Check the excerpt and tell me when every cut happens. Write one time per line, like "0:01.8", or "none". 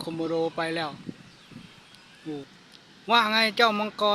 0:02.5

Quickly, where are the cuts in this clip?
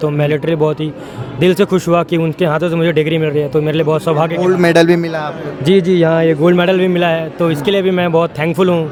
none

